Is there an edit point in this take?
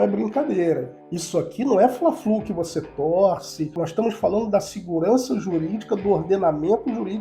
yes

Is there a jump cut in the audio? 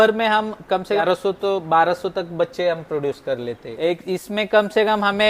yes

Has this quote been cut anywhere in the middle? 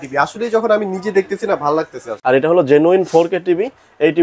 yes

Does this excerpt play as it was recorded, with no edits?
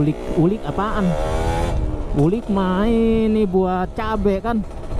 yes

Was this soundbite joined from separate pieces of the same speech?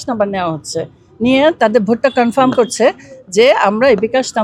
no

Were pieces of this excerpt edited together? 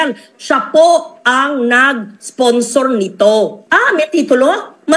yes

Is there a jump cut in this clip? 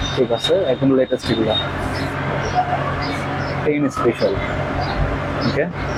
no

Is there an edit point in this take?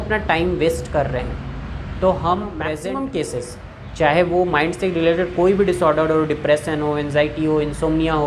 yes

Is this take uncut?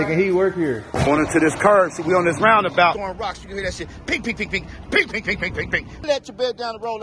no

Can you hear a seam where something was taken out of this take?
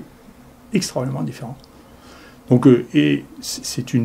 no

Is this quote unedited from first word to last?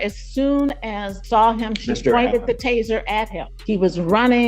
no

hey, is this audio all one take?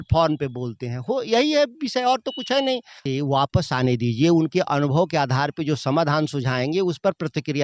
no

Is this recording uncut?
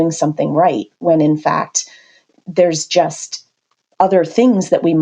yes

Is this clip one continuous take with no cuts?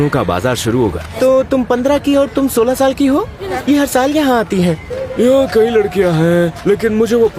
no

